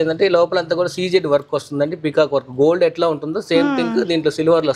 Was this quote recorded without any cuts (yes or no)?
yes